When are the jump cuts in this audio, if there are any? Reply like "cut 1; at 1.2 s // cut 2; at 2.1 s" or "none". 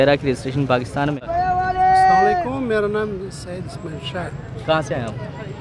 cut 1; at 1.2 s